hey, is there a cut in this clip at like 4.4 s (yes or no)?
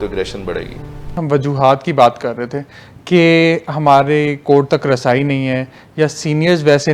no